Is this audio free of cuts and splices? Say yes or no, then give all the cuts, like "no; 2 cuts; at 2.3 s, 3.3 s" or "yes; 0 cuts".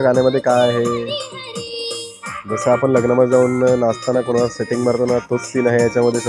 yes; 0 cuts